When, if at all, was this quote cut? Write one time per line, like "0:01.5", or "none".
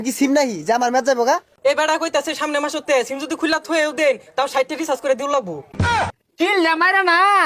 0:01.5
0:06.0